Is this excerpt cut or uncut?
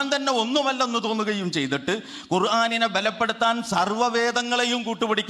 uncut